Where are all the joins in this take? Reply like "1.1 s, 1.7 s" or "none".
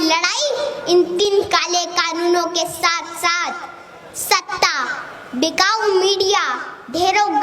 1.2 s